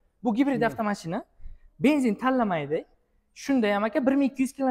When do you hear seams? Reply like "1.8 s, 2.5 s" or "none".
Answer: none